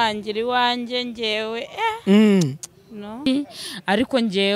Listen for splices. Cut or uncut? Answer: cut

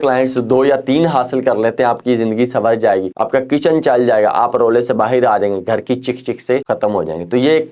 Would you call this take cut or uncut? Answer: cut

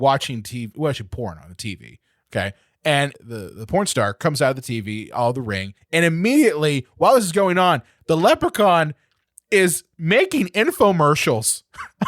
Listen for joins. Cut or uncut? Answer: cut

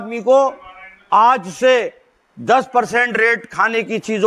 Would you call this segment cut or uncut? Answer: uncut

